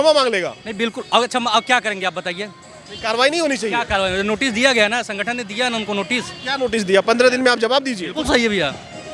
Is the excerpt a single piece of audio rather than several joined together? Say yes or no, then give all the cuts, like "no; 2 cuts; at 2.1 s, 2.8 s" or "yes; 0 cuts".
no; 1 cut; at 8.1 s